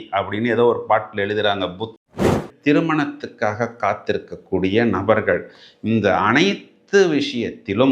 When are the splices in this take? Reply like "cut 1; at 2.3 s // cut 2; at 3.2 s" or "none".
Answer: cut 1; at 2.1 s

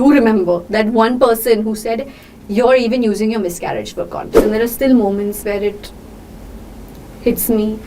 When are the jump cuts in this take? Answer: cut 1; at 4.3 s

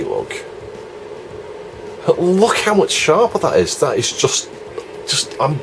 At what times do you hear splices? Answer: cut 1; at 1.4 s

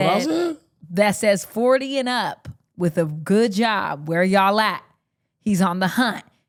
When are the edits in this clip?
none

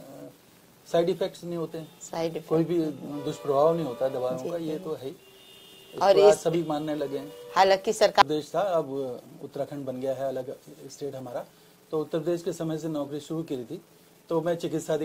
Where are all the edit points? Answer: cut 1; at 8.2 s

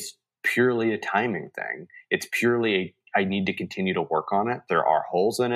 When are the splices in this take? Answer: none

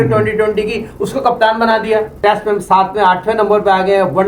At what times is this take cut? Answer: cut 1; at 2.2 s

